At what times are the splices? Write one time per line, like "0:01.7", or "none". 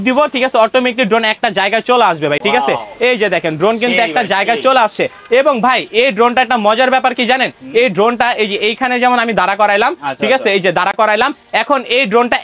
none